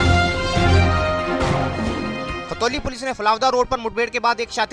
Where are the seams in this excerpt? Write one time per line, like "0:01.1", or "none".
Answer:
0:02.2